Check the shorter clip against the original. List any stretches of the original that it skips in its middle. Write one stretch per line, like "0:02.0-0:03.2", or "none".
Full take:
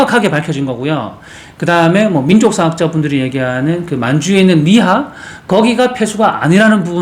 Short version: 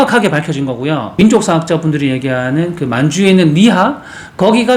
0:01.2-0:02.3